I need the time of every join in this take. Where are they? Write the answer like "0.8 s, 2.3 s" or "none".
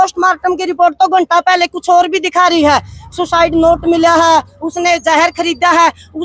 none